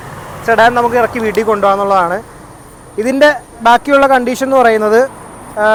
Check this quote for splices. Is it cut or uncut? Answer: uncut